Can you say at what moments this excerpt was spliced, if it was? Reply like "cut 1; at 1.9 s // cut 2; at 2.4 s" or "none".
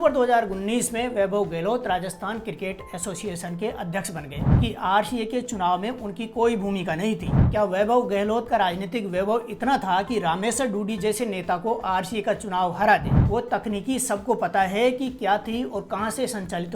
cut 1; at 4.6 s // cut 2; at 7.3 s // cut 3; at 13.3 s